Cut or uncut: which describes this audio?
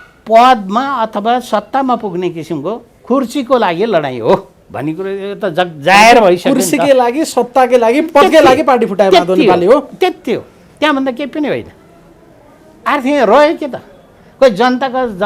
uncut